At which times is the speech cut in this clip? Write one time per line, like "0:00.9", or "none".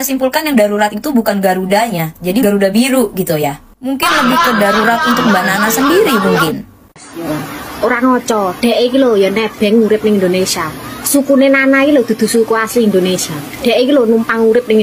0:02.4
0:07.1